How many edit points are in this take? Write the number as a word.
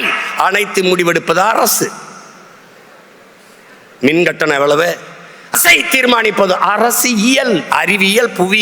one